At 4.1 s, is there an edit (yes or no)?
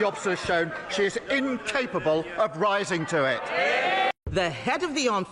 yes